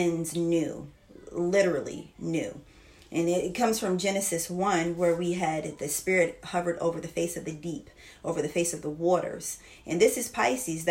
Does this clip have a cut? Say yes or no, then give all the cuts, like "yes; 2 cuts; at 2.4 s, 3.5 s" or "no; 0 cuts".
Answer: no; 0 cuts